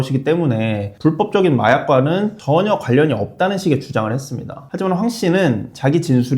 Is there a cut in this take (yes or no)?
yes